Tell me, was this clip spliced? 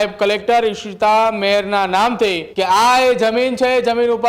yes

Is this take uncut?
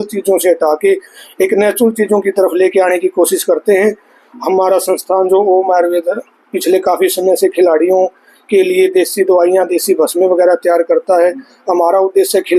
yes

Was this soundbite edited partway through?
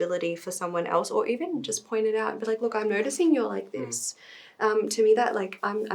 no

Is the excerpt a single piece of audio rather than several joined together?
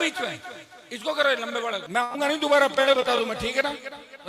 no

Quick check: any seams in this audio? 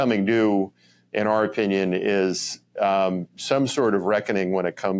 no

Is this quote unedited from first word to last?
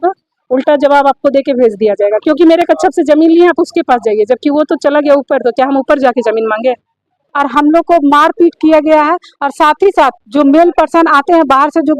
no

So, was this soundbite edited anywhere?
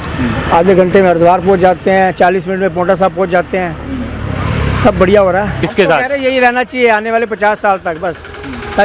yes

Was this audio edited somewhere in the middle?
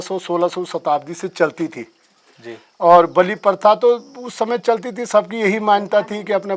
no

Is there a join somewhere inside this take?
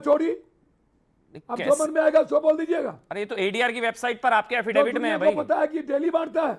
no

